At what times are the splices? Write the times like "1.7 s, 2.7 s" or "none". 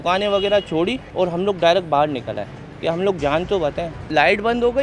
1.0 s, 3.9 s